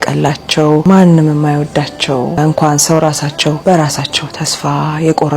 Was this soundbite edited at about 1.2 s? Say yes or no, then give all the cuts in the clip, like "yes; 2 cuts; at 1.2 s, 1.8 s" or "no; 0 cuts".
no; 1 cut; at 3.6 s